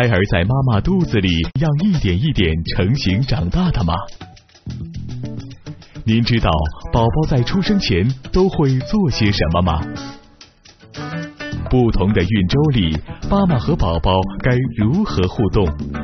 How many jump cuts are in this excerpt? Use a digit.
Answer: 1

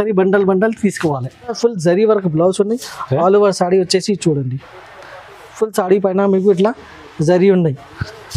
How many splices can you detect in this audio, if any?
1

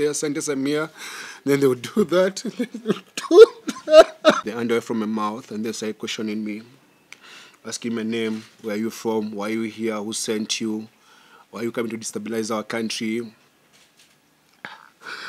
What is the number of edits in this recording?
1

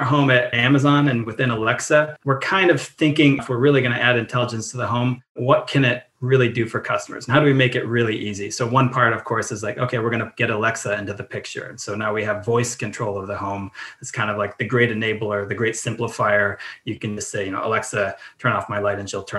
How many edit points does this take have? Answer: 2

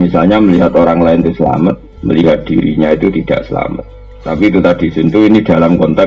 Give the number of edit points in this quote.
1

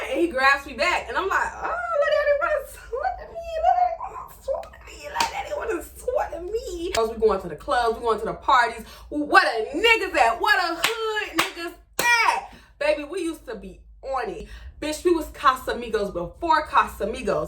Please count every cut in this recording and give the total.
2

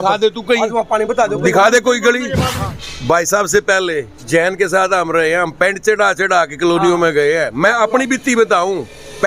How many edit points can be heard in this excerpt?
1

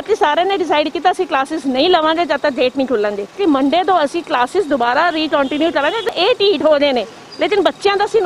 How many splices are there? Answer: 2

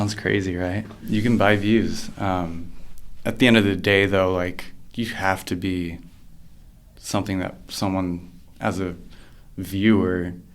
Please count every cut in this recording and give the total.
1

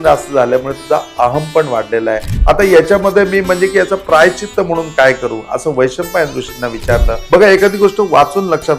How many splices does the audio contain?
2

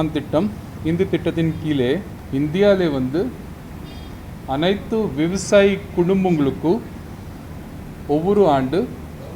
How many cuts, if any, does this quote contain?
1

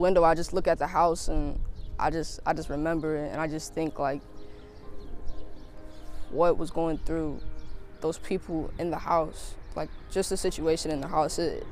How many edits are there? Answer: 0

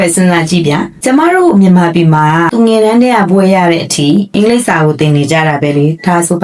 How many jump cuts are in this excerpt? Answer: 1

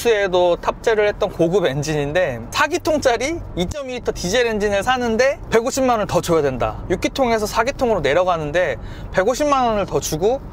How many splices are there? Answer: 1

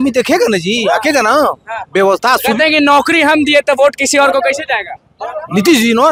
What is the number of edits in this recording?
0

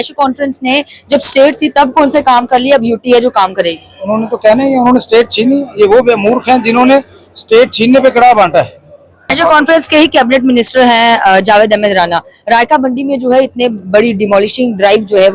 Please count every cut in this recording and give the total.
1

